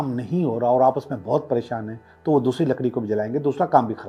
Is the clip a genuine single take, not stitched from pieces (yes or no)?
yes